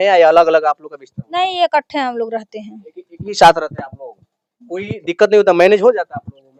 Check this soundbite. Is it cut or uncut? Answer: uncut